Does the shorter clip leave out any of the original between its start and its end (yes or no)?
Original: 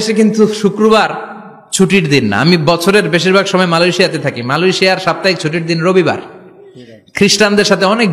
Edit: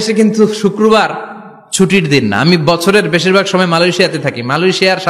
no